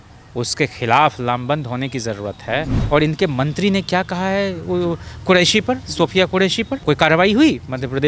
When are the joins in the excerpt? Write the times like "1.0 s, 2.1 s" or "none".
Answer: 2.8 s, 6.8 s